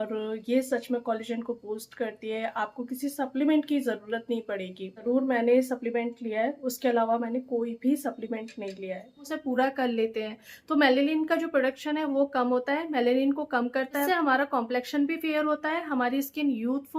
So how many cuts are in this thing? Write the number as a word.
three